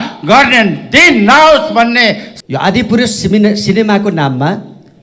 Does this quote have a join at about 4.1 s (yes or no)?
no